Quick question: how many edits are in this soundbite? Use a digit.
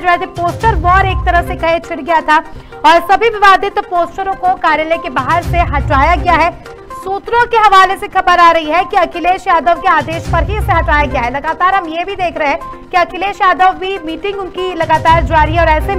0